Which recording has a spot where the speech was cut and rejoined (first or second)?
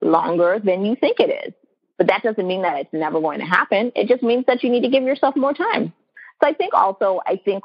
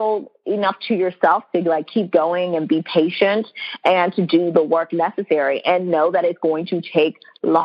first